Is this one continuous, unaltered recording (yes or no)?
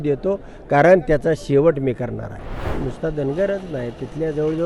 no